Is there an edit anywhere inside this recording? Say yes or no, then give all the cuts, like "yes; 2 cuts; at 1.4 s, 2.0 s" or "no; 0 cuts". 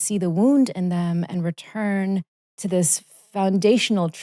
yes; 1 cut; at 2.4 s